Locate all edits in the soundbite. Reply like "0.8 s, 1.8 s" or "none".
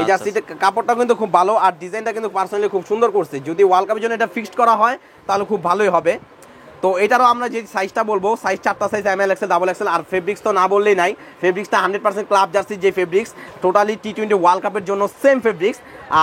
none